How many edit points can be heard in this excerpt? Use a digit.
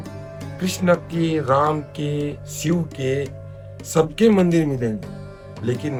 0